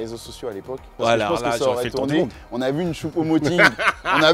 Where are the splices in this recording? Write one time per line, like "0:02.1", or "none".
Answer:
0:00.9